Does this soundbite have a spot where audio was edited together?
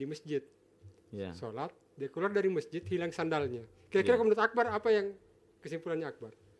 no; 0 cuts

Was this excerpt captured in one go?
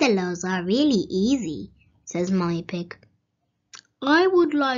no; 1 cut; at 2.7 s

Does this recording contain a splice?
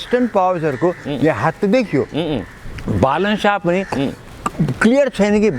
no; 0 cuts

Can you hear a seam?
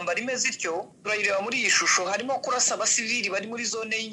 yes; 1 cut; at 0.9 s

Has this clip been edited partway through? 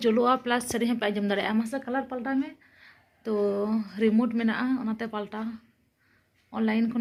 no; 0 cuts

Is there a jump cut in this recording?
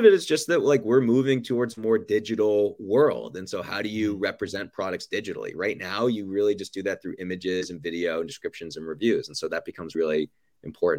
yes; 1 cut; at 9.9 s

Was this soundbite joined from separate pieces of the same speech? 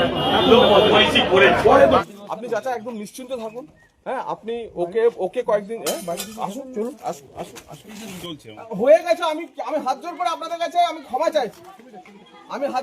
yes; 2 cuts; at 2.0 s, 8.3 s

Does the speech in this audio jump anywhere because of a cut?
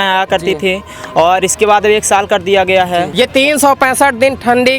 yes; 1 cut; at 3.1 s

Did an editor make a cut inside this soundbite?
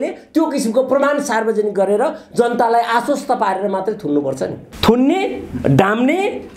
yes; 1 cut; at 4.6 s

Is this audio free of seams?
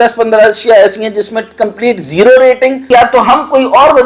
no; 1 cut; at 2.8 s

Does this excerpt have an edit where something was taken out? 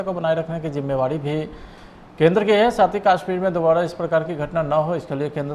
no; 0 cuts

